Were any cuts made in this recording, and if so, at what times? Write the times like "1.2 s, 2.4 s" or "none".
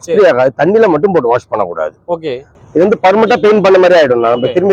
2.6 s